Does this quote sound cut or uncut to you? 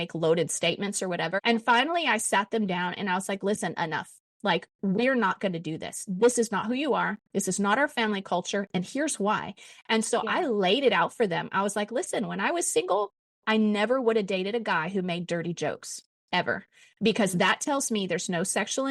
cut